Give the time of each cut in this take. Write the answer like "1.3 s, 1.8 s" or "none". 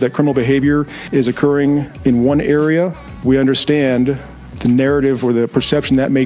1.0 s, 1.9 s, 3.0 s, 4.5 s